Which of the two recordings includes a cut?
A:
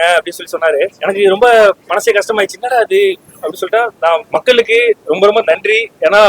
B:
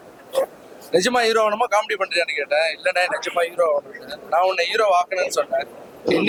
A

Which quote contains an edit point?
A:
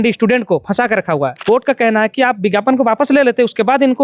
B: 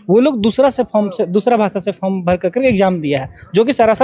A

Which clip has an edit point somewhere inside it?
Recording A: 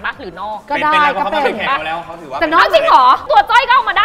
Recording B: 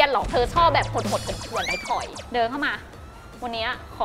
B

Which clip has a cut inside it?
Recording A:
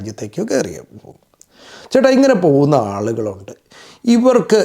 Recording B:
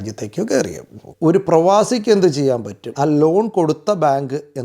B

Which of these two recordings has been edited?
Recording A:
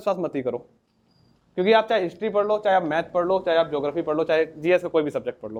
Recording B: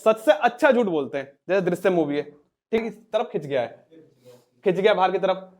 B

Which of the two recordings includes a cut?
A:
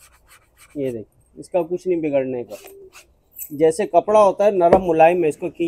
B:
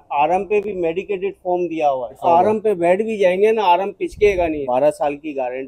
B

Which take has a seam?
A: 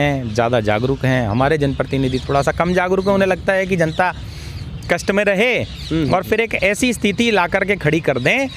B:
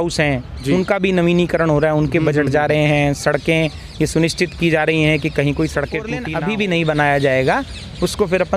B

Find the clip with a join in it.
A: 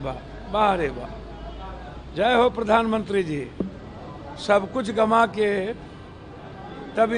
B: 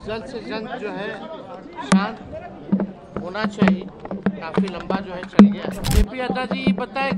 B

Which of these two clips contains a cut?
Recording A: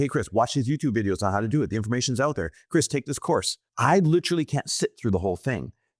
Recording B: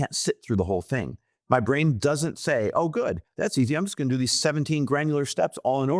A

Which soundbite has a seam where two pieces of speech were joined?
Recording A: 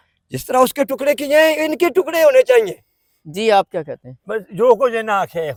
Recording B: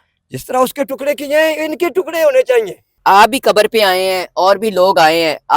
B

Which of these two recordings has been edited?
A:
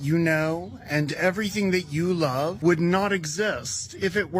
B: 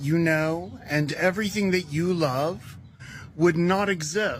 A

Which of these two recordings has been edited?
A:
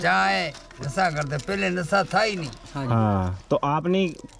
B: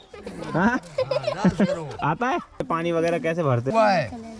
B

